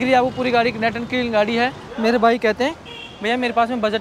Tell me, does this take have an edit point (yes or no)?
yes